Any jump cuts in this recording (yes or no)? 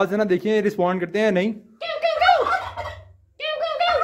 no